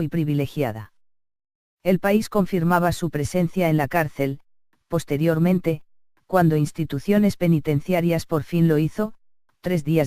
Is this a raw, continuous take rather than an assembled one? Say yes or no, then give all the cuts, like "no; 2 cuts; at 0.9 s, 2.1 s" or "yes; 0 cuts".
no; 1 cut; at 7.0 s